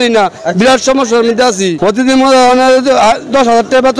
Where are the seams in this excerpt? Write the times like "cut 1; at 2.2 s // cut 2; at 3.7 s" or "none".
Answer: cut 1; at 1.8 s